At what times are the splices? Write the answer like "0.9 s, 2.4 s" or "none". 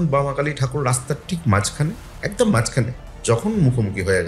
none